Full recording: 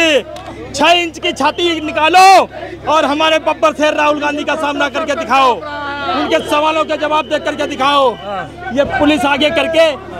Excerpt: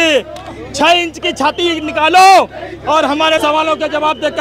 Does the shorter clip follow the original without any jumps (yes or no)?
no